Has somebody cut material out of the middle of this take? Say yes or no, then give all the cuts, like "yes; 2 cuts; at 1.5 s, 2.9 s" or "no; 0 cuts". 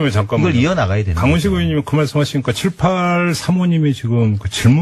no; 0 cuts